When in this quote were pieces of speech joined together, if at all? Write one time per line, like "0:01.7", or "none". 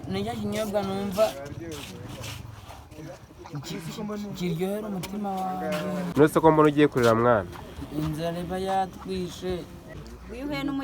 0:06.1
0:10.0